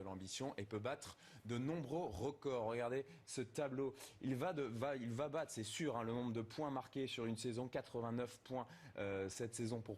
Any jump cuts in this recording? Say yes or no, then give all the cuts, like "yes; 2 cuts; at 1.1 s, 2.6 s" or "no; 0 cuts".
yes; 1 cut; at 6.2 s